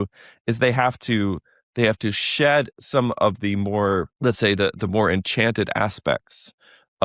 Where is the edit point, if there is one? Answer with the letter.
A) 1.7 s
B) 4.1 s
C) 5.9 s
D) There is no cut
B